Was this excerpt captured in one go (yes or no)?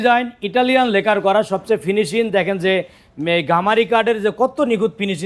yes